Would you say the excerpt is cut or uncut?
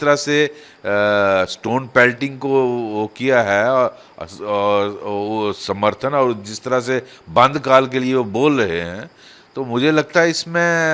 uncut